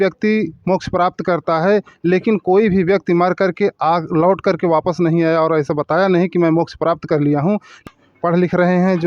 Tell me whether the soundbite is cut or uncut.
cut